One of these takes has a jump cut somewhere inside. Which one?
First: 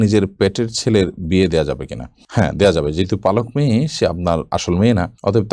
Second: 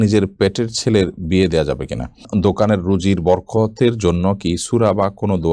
second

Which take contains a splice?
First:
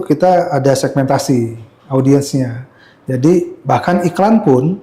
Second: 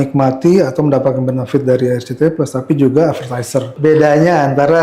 second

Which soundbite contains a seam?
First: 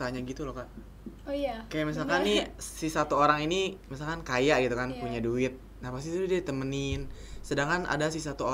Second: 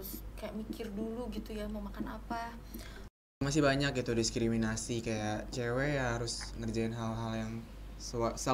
second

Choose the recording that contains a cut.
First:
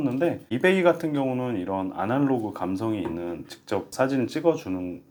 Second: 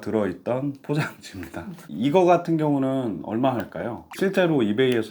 second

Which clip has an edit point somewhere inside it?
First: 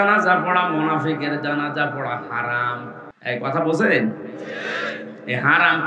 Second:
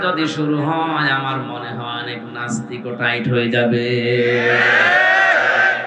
first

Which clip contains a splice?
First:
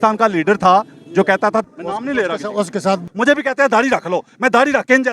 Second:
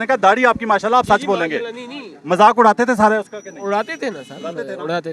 first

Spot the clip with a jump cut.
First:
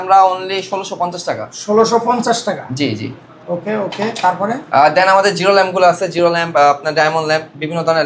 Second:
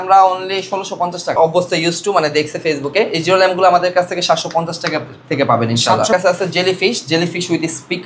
second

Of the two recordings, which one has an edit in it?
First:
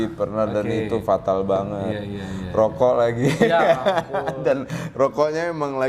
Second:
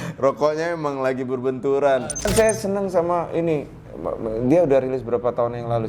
second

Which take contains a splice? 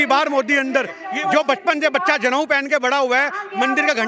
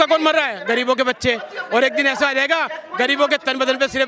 first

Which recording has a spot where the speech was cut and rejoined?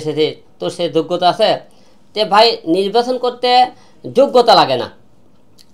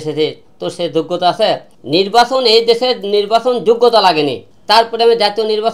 second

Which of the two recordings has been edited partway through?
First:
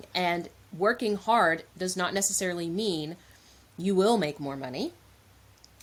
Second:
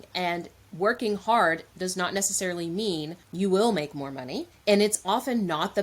second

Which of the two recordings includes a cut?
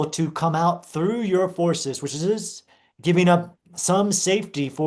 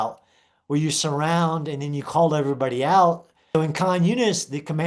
second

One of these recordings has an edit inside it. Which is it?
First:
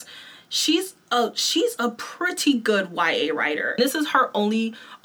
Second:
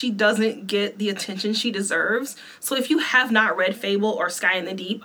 first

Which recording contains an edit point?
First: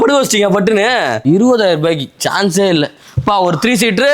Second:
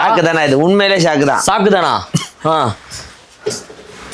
first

